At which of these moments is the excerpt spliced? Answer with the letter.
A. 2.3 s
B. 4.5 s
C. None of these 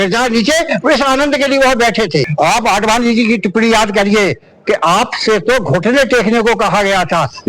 A